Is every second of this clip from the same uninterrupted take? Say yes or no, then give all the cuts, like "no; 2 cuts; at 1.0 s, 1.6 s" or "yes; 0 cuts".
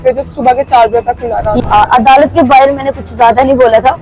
no; 1 cut; at 1.6 s